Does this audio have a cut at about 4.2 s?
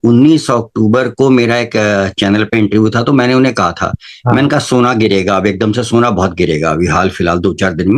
no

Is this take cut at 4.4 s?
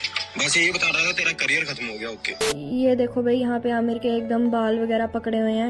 no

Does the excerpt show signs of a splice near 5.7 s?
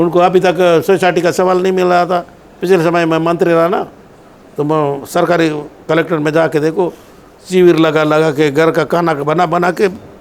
no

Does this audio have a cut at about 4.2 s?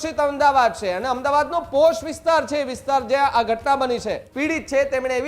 yes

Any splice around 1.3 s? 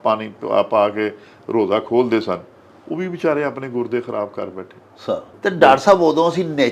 no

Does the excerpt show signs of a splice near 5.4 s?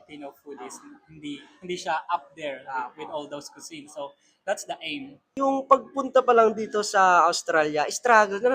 yes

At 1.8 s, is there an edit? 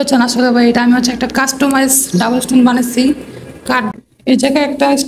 no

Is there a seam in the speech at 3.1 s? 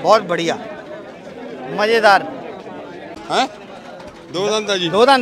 yes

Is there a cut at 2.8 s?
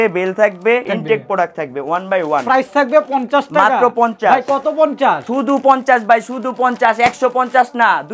no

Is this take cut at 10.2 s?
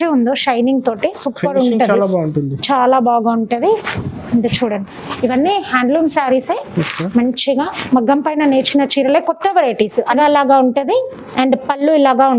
yes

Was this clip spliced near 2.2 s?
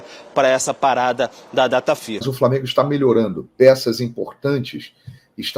yes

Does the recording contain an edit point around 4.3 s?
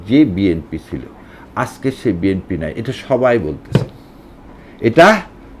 no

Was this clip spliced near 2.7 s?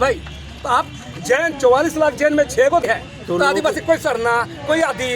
yes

